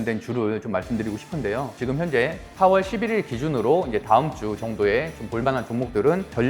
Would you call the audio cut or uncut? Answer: cut